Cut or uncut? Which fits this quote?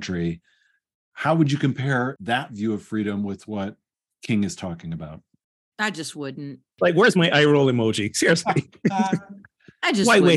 cut